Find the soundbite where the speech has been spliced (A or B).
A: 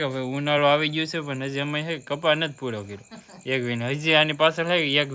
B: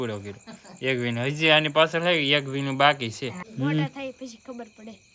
B